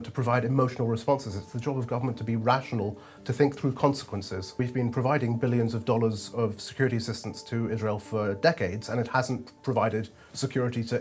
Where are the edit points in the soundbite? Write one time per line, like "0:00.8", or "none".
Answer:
0:04.5